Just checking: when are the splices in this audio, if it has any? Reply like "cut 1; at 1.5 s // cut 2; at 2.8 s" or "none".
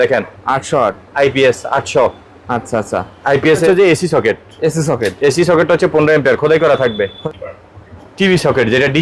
cut 1; at 3.7 s // cut 2; at 7.2 s